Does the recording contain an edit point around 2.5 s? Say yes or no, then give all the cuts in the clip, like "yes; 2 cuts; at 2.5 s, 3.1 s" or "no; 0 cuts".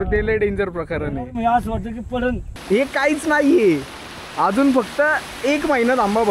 yes; 1 cut; at 2.5 s